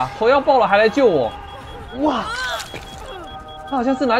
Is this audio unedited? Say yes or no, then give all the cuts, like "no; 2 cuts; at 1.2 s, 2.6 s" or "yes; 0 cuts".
yes; 0 cuts